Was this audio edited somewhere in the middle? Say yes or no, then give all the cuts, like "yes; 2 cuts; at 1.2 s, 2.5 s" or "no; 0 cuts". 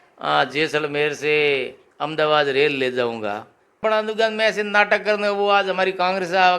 yes; 1 cut; at 3.8 s